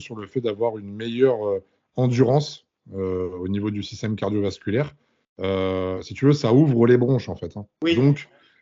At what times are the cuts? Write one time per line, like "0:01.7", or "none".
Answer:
none